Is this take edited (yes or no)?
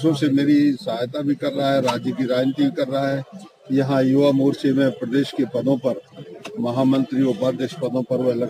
no